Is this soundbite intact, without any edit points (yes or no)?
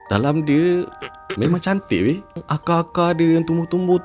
no